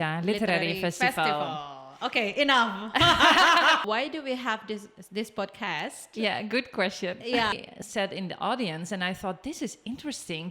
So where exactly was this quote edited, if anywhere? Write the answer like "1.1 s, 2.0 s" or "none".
3.8 s, 7.7 s